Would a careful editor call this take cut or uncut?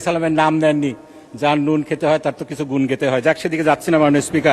uncut